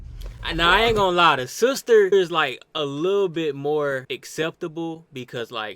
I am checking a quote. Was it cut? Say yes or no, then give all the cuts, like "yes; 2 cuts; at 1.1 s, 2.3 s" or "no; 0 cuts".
yes; 2 cuts; at 2.1 s, 4.0 s